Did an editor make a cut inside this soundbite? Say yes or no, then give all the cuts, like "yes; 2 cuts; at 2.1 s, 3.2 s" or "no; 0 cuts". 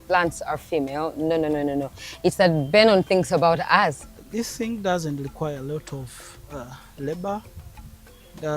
yes; 1 cut; at 4.2 s